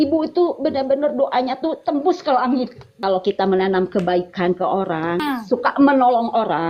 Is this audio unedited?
no; 2 cuts; at 3.0 s, 5.2 s

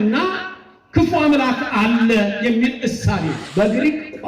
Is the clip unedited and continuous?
no; 1 cut; at 3.4 s

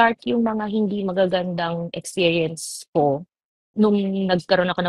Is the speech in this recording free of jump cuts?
yes; 0 cuts

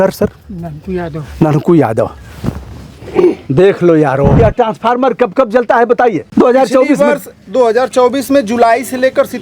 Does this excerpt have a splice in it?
yes; 2 cuts; at 4.3 s, 6.2 s

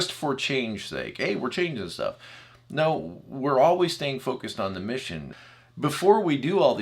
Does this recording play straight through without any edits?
no; 1 cut; at 5.2 s

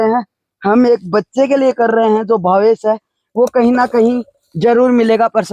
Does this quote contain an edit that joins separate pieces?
no; 0 cuts

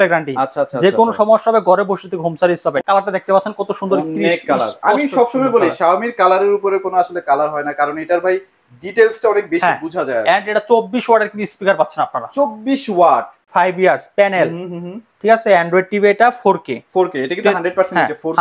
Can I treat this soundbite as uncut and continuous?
no; 2 cuts; at 2.8 s, 13.4 s

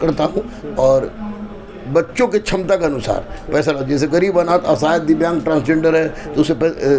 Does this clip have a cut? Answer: no; 0 cuts

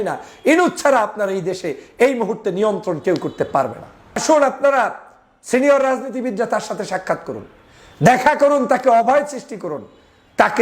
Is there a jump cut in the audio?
yes; 1 cut; at 4.2 s

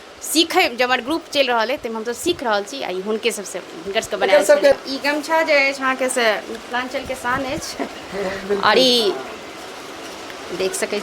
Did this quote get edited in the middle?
yes; 1 cut; at 4.7 s

